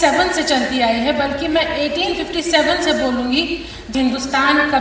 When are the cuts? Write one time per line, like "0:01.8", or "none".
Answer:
0:03.8